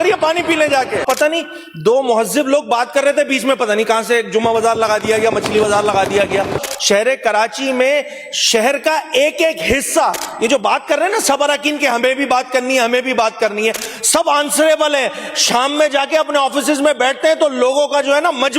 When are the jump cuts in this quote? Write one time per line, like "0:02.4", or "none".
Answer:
0:01.0
0:06.6